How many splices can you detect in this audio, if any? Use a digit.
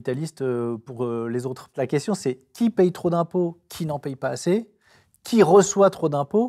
1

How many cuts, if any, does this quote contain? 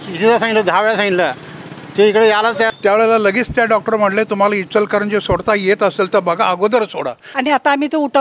2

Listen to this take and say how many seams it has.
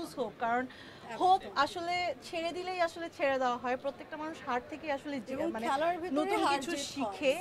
0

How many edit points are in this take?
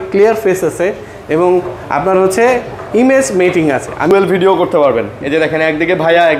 1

